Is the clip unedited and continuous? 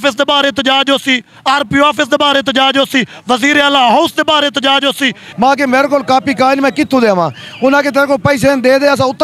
no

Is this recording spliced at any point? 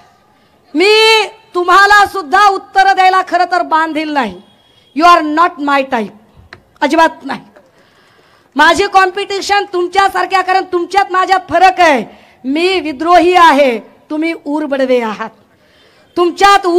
no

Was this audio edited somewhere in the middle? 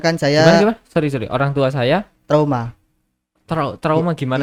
no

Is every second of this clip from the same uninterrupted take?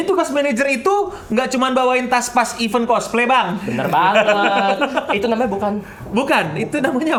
yes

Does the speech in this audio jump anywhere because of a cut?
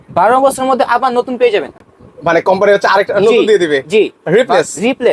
no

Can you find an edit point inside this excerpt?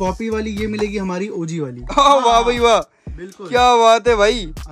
yes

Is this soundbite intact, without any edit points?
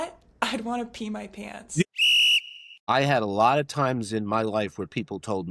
no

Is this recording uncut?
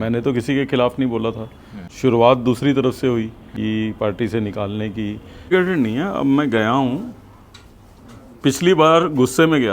no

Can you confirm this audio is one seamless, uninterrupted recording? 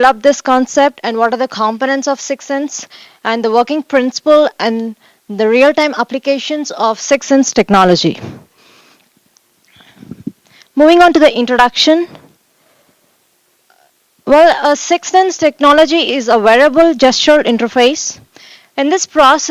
yes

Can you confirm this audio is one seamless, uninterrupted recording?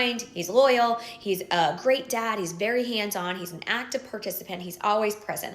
no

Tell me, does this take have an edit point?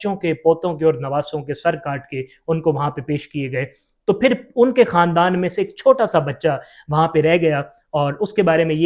no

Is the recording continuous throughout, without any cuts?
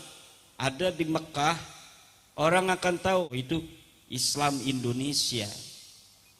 no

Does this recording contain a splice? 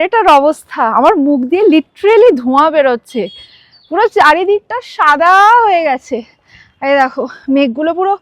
no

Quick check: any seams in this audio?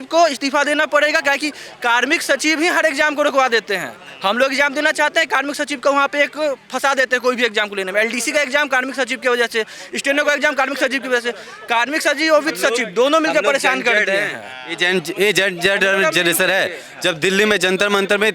no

